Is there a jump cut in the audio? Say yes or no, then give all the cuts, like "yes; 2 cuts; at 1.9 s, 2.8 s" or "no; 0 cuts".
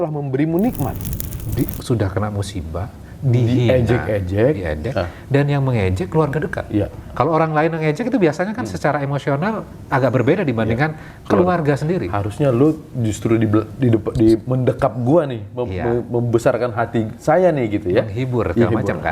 yes; 1 cut; at 1.0 s